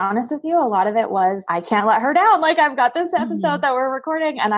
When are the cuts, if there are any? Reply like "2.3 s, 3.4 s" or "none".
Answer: 1.4 s